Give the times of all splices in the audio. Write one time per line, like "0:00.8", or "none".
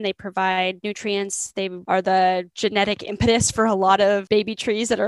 0:01.8
0:02.5
0:04.2